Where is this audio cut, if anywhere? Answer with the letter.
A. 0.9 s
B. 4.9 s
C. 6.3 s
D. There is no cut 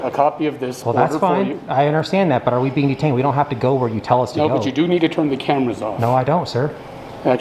D